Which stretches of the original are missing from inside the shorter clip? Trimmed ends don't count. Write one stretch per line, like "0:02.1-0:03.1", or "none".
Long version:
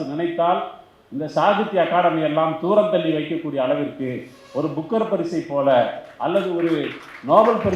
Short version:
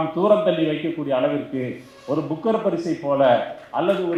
none

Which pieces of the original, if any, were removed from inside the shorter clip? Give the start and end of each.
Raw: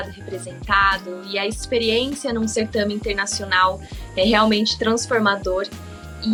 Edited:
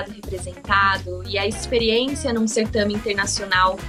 none

